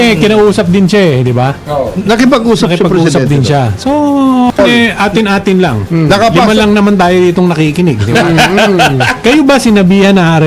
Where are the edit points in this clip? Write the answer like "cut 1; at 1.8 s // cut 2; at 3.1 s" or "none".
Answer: cut 1; at 4.6 s